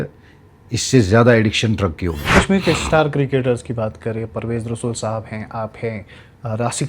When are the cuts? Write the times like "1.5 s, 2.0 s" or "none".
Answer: 2.3 s